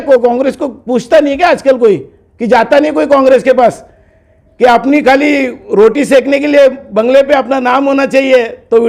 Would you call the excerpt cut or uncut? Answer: uncut